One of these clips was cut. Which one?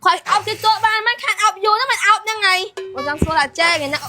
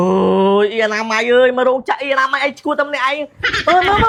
first; 1 cut; at 2.8 s

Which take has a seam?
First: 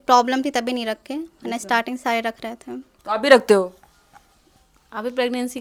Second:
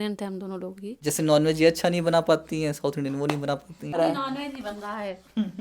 second; 2 cuts; at 1.0 s, 4.0 s

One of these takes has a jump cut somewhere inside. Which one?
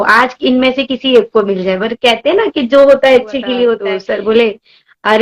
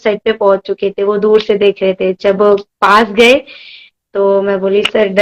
first; 1 cut; at 3.9 s

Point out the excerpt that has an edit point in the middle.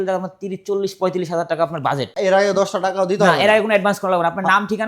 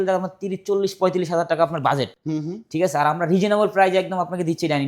first; 1 cut; at 2.1 s

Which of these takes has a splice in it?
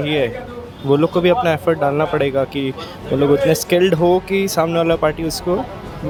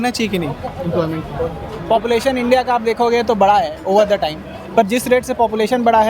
second; 1 cut; at 1.7 s

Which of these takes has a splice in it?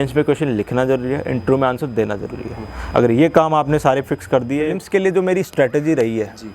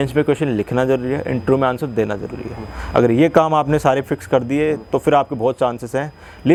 first; 1 cut; at 4.8 s

